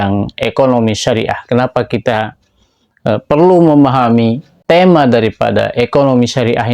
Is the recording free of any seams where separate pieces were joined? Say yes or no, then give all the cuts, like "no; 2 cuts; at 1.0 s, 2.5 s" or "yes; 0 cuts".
no; 1 cut; at 4.5 s